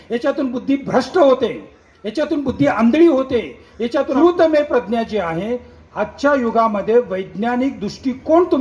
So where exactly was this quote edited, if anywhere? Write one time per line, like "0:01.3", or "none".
0:04.1